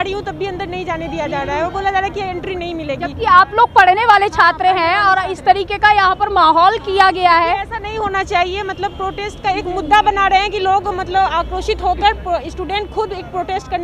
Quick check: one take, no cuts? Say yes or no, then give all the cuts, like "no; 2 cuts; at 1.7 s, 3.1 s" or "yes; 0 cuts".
yes; 0 cuts